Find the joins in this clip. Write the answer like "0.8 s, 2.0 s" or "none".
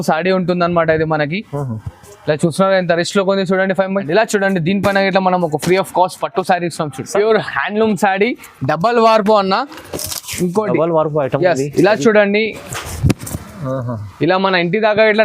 4.1 s, 7.1 s